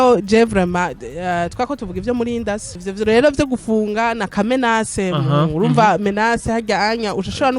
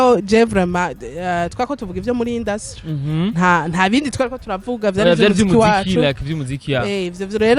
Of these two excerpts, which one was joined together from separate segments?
first; 1 cut; at 2.8 s

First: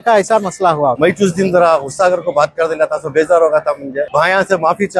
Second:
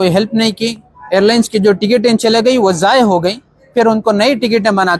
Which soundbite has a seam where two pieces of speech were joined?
first; 2 cuts; at 1.0 s, 4.1 s

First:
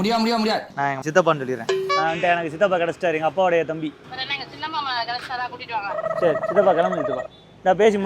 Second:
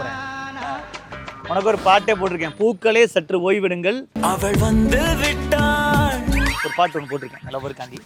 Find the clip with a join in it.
first; 1 cut; at 2.0 s

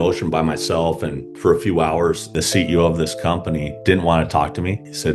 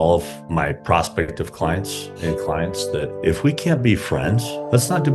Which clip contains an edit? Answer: first; 1 cut; at 2.3 s

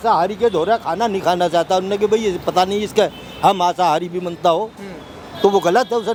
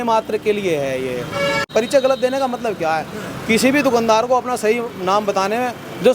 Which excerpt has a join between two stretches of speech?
second; 1 cut; at 1.7 s

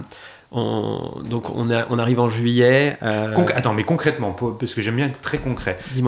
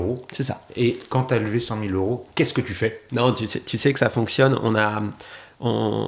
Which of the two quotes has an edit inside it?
second; 2 cuts; at 1.1 s, 3.0 s

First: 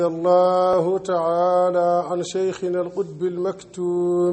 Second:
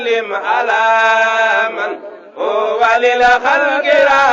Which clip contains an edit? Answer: second; 1 cut; at 1.6 s

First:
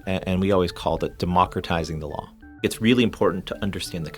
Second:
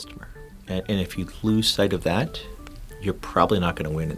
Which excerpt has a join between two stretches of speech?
first; 1 cut; at 2.6 s

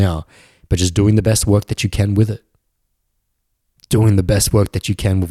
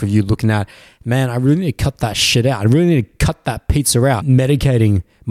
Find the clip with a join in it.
second; 1 cut; at 4.2 s

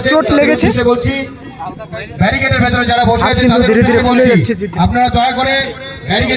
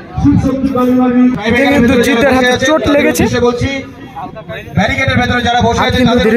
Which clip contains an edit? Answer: second; 1 cut; at 1.4 s

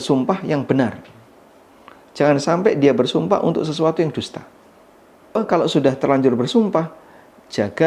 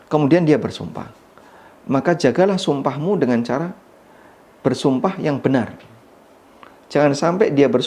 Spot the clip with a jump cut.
first; 1 cut; at 5.4 s

